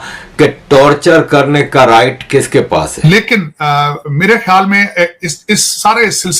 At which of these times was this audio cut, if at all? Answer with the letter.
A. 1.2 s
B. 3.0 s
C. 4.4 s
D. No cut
B